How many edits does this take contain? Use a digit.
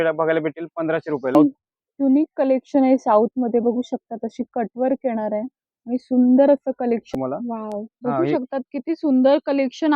2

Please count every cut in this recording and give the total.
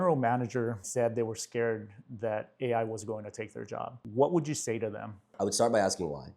3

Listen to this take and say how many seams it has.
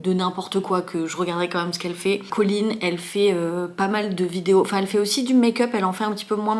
0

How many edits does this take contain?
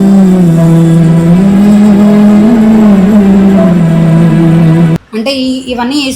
1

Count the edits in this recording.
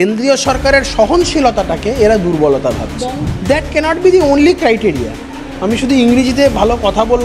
1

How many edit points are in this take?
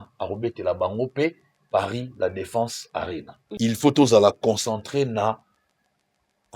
1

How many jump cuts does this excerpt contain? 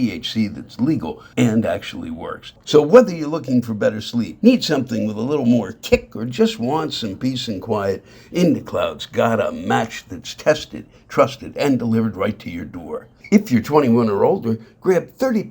3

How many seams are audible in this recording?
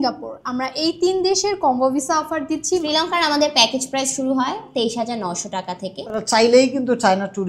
2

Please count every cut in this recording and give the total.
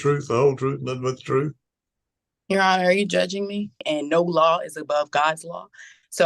1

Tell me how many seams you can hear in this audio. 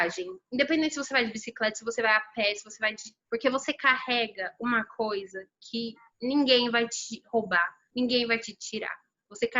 1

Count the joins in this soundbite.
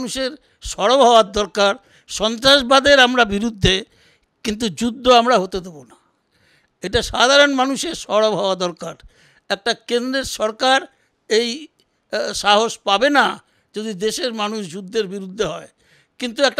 0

